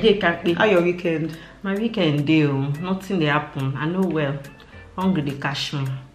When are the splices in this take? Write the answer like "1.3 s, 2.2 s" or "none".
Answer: none